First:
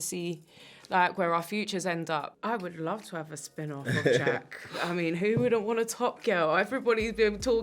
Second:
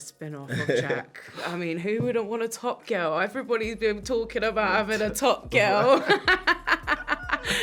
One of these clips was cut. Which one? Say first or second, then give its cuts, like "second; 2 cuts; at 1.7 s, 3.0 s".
first; 1 cut; at 2.3 s